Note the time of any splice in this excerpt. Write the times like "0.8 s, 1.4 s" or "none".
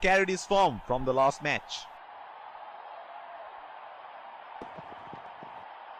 1.6 s, 5.2 s

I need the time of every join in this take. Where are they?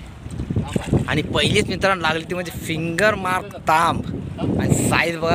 none

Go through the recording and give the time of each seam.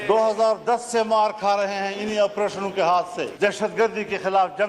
3.3 s

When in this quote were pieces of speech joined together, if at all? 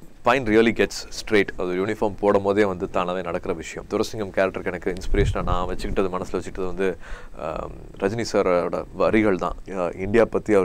3.7 s, 9.6 s

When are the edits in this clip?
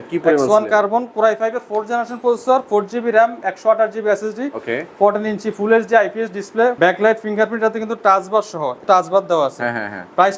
6.8 s, 8.8 s

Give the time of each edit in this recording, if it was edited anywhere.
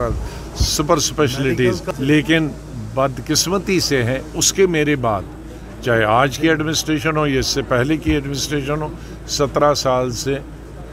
1.9 s

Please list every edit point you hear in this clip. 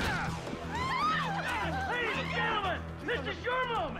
none

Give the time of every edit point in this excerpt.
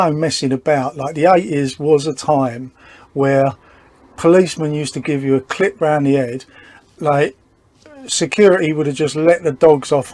none

